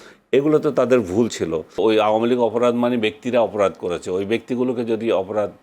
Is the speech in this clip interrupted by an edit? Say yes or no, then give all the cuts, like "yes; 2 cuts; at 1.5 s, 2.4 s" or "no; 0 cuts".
yes; 1 cut; at 1.8 s